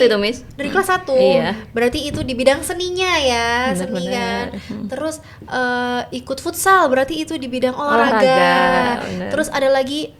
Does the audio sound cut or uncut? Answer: uncut